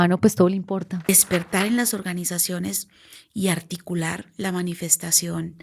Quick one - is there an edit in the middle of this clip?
yes; 1 cut; at 1.1 s

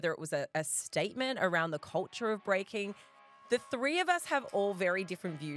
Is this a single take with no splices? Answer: no; 1 cut; at 3.0 s

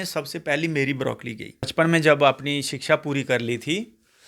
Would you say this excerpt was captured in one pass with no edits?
no; 1 cut; at 1.7 s

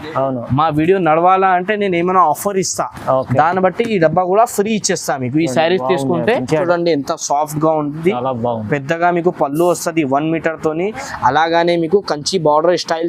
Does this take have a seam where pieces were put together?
yes; 1 cut; at 6.7 s

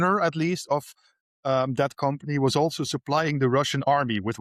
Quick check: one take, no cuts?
yes; 0 cuts

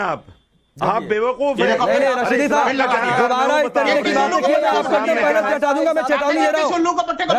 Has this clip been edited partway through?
no; 0 cuts

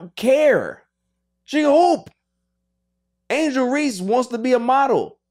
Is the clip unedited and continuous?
yes; 0 cuts

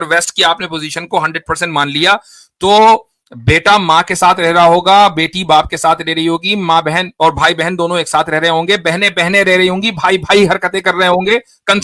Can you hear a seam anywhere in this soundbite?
no; 0 cuts

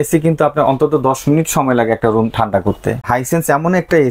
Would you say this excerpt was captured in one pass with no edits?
no; 1 cut; at 3.0 s

